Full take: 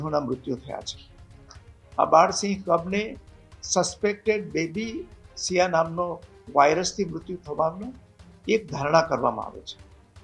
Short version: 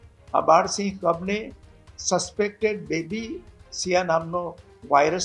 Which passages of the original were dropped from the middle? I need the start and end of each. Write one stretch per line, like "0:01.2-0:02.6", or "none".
none